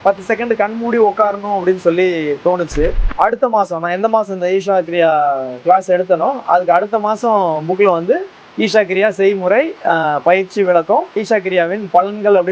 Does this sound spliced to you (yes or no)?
yes